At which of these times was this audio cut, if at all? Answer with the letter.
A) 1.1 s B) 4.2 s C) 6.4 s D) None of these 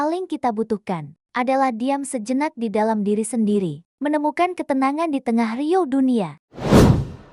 C